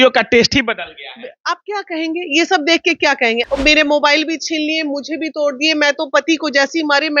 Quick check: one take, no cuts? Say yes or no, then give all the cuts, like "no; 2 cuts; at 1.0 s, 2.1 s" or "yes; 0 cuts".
no; 1 cut; at 3.5 s